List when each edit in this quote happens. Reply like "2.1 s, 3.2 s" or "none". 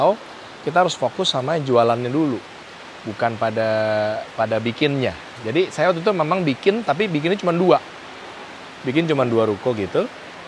none